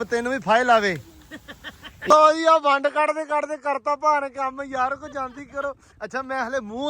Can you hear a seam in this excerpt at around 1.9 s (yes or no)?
yes